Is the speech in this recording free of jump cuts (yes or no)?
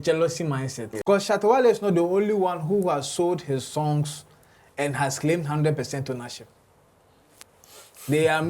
no